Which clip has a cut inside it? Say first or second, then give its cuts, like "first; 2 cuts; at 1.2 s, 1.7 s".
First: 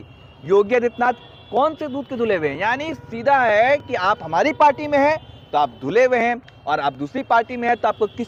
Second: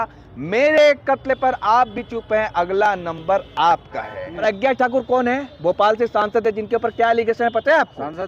second; 1 cut; at 4.4 s